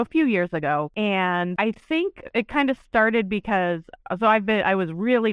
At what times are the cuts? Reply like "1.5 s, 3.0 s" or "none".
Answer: 0.9 s, 1.5 s